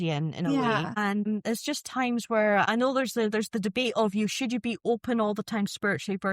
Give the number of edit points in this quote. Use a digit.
2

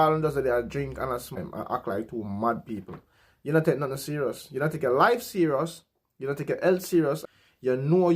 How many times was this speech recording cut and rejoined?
2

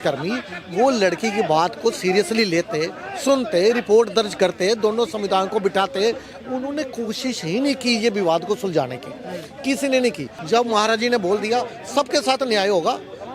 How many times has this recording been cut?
1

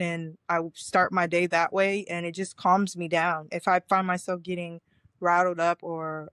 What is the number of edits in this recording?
0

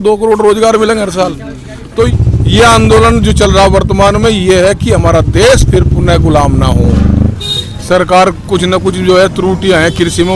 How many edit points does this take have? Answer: 2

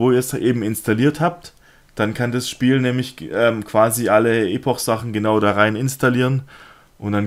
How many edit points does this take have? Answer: 1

